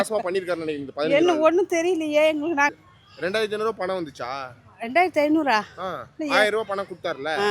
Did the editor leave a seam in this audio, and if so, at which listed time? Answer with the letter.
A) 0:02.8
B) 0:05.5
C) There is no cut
A